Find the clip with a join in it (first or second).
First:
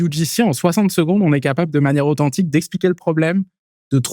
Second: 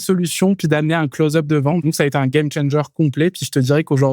second